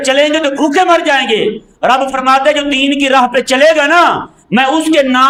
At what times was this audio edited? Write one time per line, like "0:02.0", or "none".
none